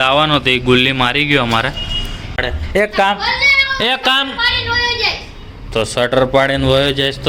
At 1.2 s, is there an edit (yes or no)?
no